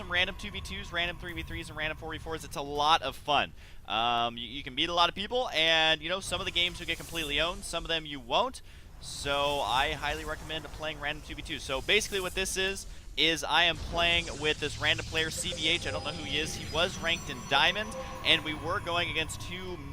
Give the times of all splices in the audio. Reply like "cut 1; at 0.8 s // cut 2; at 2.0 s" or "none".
none